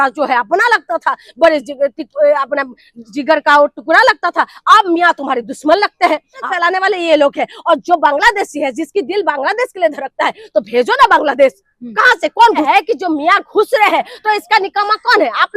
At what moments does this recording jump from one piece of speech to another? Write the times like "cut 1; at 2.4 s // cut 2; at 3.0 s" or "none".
cut 1; at 6.4 s // cut 2; at 12.7 s